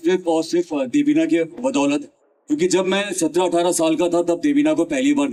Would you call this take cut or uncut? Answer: uncut